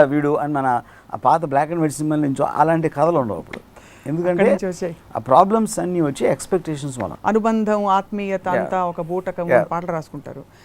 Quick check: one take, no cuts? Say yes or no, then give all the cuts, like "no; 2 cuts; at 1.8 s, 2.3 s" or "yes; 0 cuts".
yes; 0 cuts